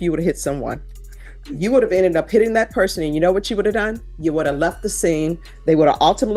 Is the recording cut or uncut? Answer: uncut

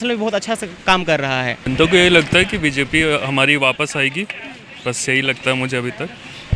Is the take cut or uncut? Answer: cut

